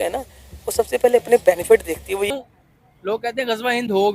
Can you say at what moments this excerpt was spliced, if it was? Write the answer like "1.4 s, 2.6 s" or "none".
2.3 s

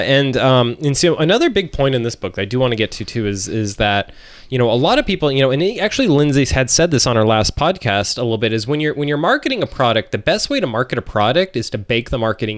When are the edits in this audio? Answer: none

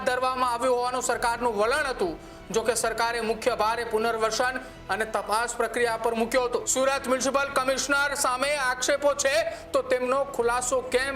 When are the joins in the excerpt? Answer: 6.7 s

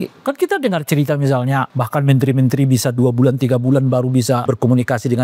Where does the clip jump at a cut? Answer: 1.7 s, 4.4 s

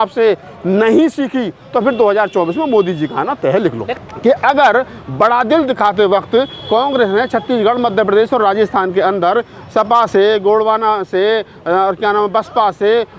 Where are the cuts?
3.9 s

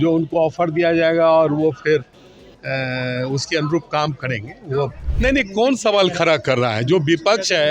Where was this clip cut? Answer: 5.0 s

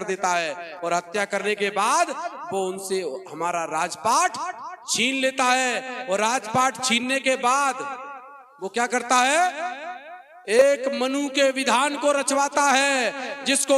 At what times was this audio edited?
none

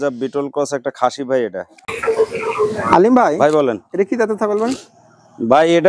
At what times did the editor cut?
1.7 s

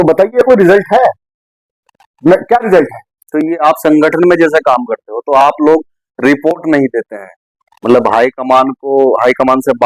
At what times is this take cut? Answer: none

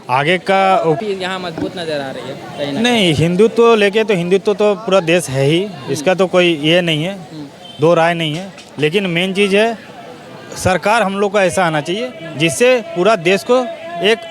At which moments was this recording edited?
1.0 s

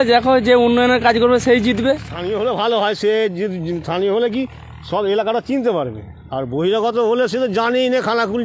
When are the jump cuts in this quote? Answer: 2.1 s

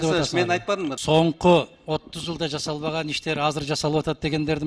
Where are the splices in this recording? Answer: 0.9 s

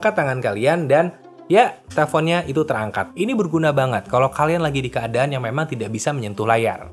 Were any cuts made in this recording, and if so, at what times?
3.0 s

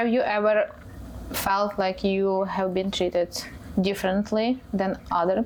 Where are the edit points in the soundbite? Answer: none

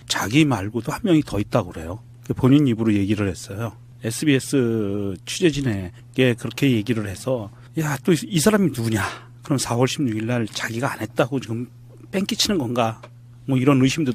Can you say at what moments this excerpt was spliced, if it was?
11.7 s

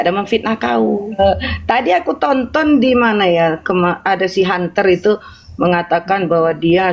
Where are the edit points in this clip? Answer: 1.2 s

